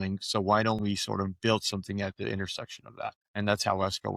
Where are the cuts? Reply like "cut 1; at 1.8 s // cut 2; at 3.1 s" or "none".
cut 1; at 3.2 s

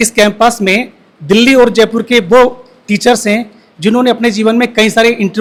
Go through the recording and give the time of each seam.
none

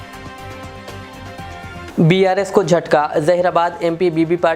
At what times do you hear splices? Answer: cut 1; at 1.9 s

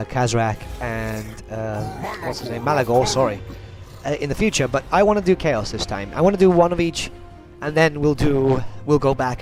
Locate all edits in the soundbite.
none

